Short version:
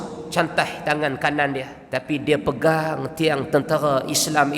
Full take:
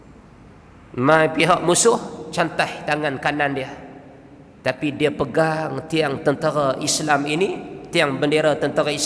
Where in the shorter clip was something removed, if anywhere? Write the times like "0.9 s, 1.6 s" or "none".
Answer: 1.8 s